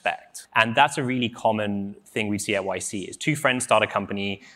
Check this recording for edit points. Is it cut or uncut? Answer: uncut